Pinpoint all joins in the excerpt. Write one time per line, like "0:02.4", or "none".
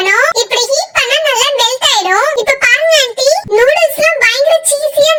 none